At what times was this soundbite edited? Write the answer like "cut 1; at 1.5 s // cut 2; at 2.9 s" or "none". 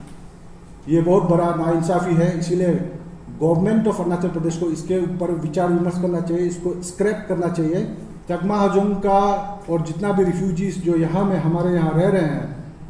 cut 1; at 8.1 s